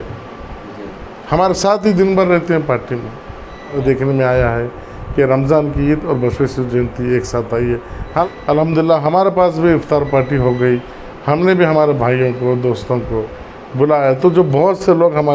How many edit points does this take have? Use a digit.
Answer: 2